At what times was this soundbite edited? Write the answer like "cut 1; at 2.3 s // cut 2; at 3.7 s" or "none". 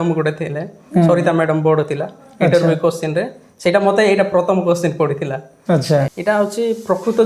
cut 1; at 6.1 s